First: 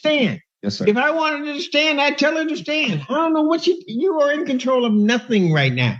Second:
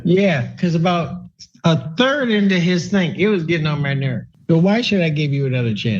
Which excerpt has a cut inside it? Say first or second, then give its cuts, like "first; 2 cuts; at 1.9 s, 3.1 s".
second; 1 cut; at 4.2 s